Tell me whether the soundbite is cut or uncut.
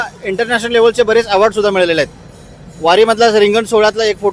uncut